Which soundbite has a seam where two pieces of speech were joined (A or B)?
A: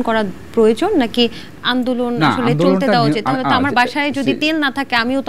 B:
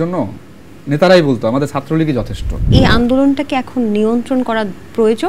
B